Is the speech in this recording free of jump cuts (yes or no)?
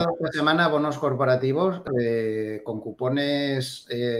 no